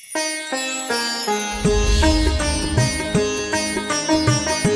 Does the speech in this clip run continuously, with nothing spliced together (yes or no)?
no